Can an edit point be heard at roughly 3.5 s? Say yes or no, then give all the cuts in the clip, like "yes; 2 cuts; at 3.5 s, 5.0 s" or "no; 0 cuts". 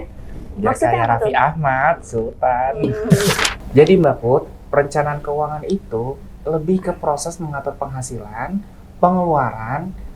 yes; 1 cut; at 3.5 s